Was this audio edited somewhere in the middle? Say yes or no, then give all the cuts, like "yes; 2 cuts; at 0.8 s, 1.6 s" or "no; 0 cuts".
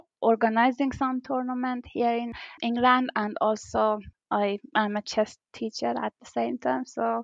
yes; 2 cuts; at 2.6 s, 4.1 s